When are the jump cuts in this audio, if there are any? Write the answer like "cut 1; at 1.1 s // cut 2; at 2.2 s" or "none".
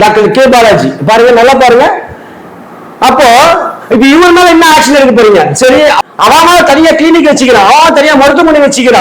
cut 1; at 6.0 s